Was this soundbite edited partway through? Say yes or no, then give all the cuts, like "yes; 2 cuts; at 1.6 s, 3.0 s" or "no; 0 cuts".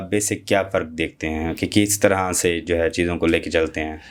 no; 0 cuts